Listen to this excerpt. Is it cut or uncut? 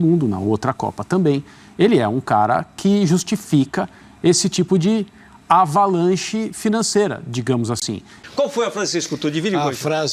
cut